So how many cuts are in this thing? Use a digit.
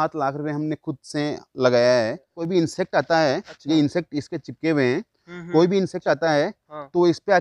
1